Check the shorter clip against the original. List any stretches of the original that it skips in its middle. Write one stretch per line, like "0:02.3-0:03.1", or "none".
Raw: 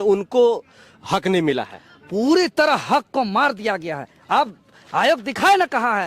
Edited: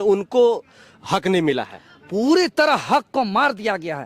none